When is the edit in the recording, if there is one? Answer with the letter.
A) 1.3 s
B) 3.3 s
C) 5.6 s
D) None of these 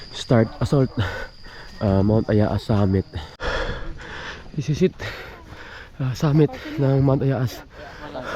B